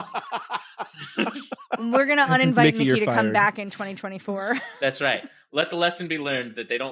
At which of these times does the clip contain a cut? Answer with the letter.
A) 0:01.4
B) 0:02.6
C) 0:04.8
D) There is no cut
D